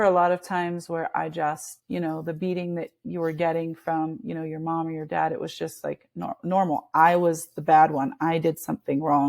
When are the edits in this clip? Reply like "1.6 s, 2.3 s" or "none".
none

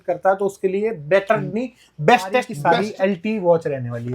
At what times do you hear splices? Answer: 2.5 s

